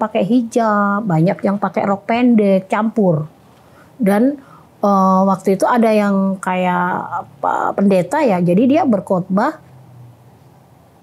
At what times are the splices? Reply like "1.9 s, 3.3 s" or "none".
none